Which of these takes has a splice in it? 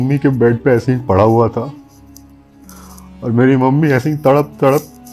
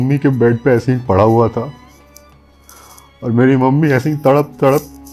first; 2 cuts; at 1.7 s, 3.2 s

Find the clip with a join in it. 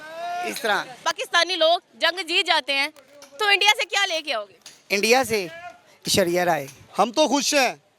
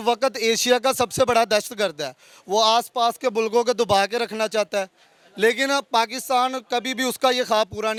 first; 2 cuts; at 0.9 s, 6.8 s

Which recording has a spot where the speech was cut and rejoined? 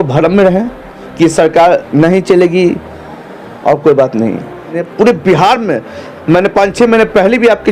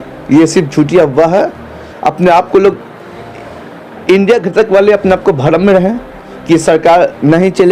first; 1 cut; at 4.7 s

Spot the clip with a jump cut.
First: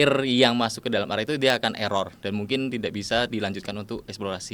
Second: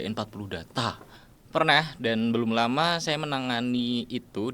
second; 1 cut; at 1.1 s

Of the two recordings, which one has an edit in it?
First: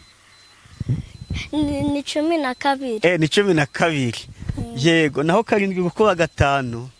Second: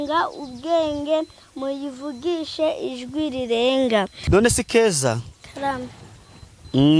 second; 1 cut; at 4.2 s

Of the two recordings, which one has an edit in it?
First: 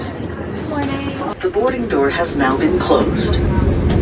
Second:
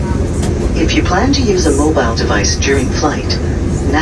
first; 1 cut; at 1.2 s

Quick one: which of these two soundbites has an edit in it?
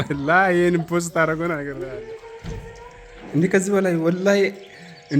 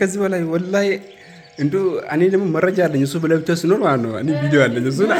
first; 1 cut; at 1.7 s

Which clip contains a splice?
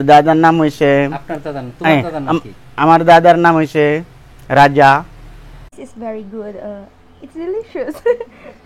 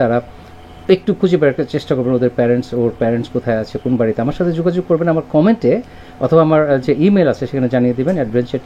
first; 1 cut; at 5.8 s

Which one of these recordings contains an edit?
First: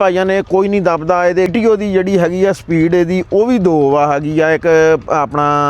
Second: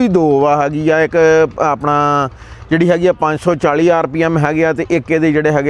first; 1 cut; at 1.5 s

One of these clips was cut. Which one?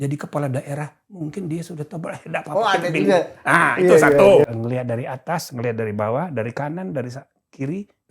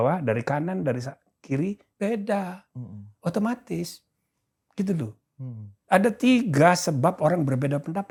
first; 1 cut; at 4.4 s

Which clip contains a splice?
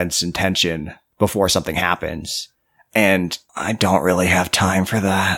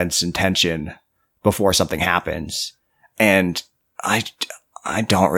first; 2 cuts; at 1.0 s, 3.5 s

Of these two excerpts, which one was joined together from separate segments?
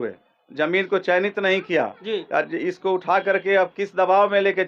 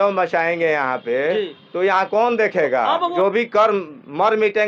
second; 1 cut; at 3.1 s

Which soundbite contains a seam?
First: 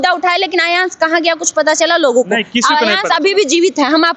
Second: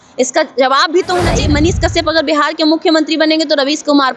second; 1 cut; at 1.4 s

